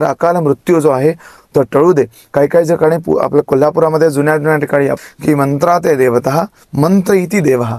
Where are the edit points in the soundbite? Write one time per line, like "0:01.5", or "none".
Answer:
0:05.0